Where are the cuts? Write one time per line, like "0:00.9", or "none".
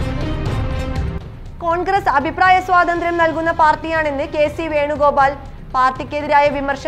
none